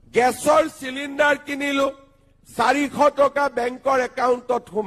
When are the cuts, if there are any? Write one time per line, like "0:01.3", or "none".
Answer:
none